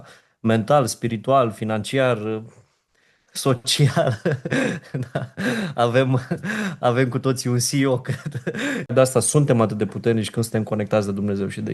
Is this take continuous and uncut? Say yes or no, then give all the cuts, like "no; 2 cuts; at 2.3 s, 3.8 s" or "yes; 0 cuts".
no; 1 cut; at 8.9 s